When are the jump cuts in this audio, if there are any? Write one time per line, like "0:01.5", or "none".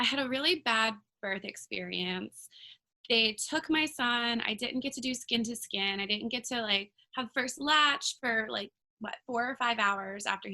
none